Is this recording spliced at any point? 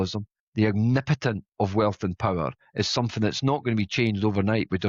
no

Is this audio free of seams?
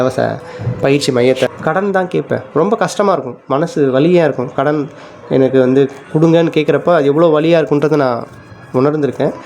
no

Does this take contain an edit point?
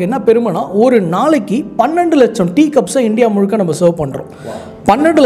no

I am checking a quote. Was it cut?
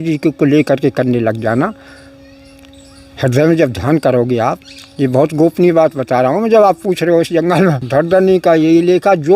yes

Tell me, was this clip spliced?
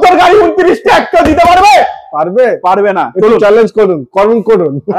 no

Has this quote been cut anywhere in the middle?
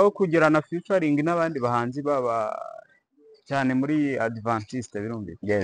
no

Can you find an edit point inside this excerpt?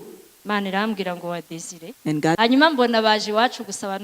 yes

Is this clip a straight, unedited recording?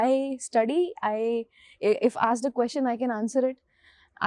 yes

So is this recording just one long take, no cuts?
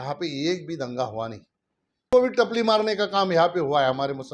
no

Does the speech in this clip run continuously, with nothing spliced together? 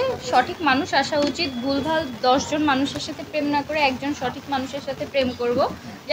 yes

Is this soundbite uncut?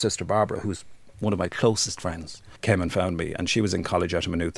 no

